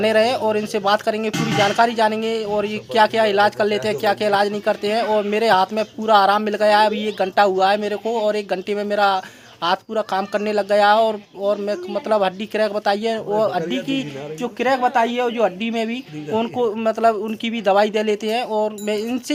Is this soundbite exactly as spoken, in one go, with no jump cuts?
yes; 0 cuts

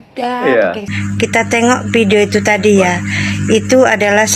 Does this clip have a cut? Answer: yes; 1 cut; at 0.9 s

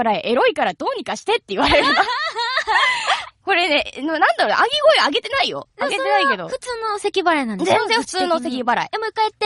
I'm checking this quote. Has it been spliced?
yes; 1 cut; at 2.4 s

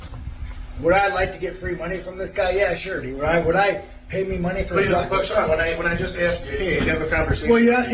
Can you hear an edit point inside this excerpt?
no; 0 cuts

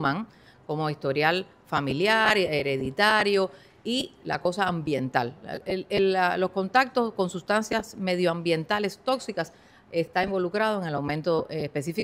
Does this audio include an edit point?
no; 0 cuts

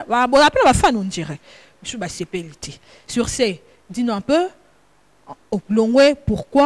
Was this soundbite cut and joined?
no; 0 cuts

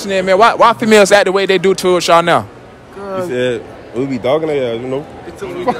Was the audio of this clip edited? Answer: no; 0 cuts

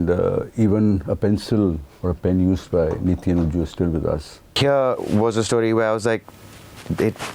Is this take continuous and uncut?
no; 1 cut; at 4.5 s

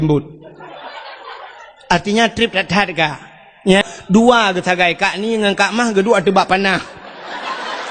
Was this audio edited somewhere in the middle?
yes; 1 cut; at 3.8 s

